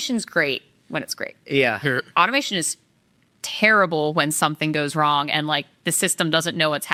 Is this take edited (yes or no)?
no